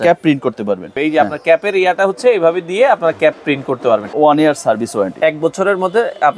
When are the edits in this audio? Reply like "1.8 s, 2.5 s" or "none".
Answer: 1.0 s, 4.1 s

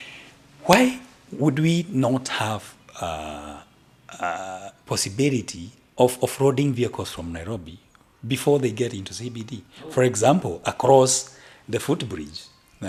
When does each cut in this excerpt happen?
none

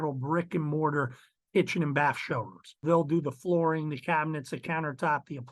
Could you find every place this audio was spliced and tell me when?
2.8 s

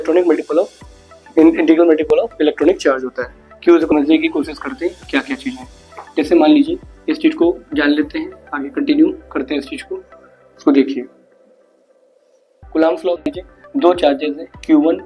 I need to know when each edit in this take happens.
3.9 s, 12.6 s, 13.2 s

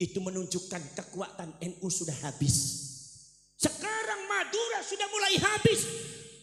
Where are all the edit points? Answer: none

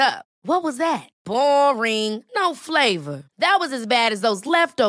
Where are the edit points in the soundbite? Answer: none

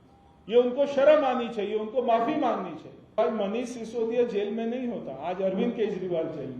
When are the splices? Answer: 3.2 s

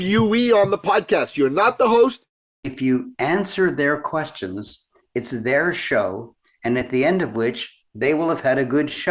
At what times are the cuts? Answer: 2.4 s

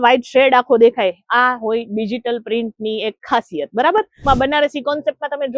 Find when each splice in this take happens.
4.2 s

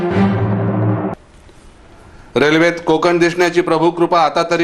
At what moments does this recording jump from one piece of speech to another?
1.1 s

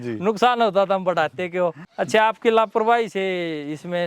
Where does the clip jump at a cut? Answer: 1.8 s

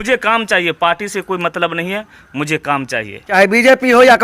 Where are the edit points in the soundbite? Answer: 3.3 s

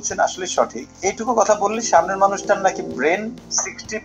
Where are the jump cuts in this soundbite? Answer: 0.9 s

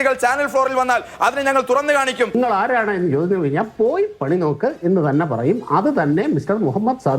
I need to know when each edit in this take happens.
2.4 s

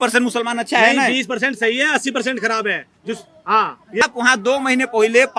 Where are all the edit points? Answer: 4.0 s

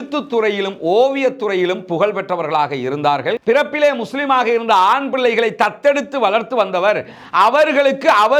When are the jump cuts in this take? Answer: 3.4 s

